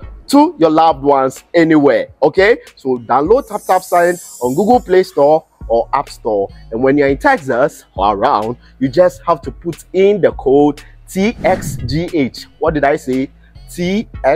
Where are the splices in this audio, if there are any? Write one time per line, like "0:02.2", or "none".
none